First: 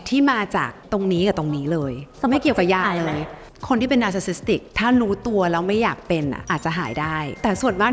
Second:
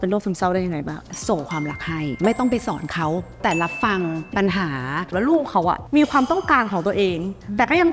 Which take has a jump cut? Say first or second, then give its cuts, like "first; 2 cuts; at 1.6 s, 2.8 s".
second; 4 cuts; at 1.1 s, 2.1 s, 3.4 s, 5.1 s